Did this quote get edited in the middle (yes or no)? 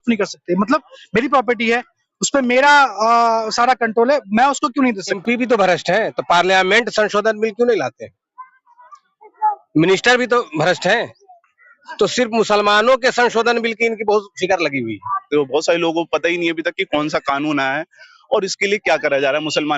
yes